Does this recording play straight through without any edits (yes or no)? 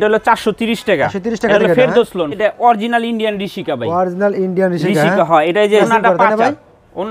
no